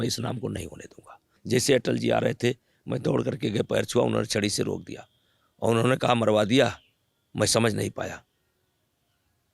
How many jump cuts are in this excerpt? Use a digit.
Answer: 1